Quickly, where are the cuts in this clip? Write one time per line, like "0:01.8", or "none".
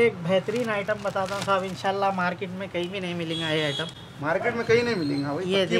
none